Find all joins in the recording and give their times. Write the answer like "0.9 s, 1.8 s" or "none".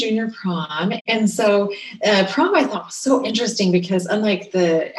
1.0 s